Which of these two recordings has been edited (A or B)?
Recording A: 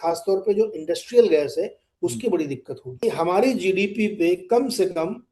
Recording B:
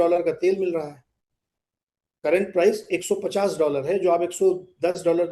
A